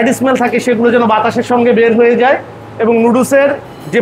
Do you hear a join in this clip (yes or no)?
no